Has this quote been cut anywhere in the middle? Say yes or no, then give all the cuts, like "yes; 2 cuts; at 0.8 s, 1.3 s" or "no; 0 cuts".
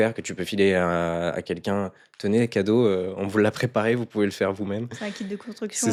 no; 0 cuts